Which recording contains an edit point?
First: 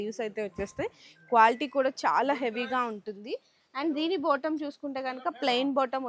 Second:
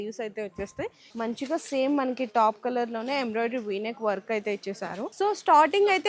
second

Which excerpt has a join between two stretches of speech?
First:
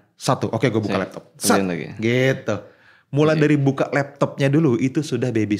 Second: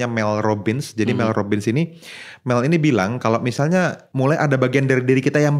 second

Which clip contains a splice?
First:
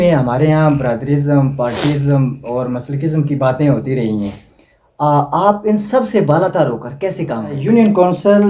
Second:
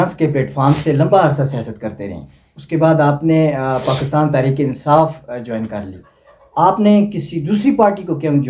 first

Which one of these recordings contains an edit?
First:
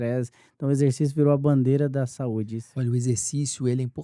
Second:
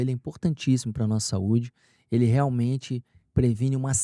first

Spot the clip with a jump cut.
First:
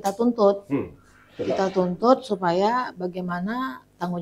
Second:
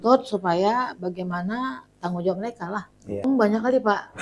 second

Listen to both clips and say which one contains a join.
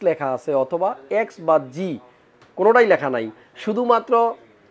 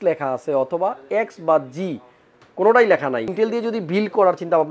second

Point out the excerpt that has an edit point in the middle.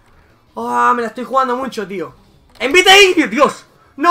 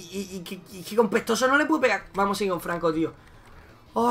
first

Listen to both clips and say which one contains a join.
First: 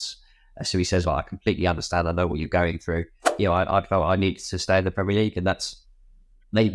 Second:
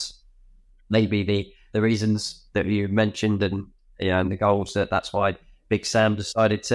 first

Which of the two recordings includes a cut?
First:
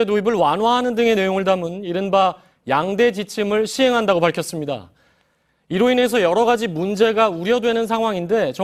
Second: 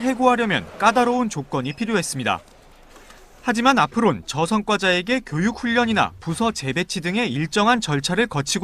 second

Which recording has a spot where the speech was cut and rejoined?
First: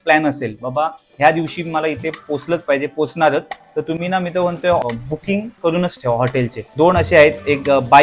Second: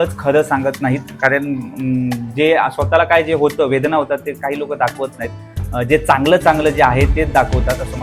first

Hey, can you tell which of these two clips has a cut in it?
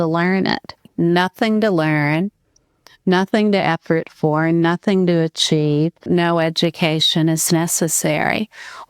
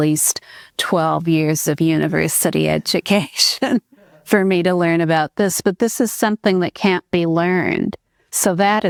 first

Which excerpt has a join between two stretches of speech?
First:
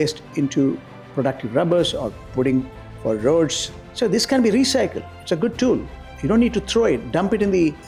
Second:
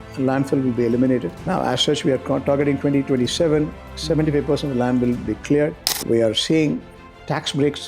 second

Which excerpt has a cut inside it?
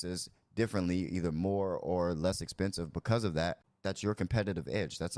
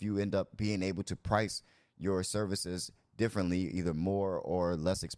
first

